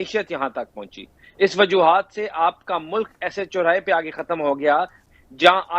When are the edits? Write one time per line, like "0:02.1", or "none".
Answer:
0:04.7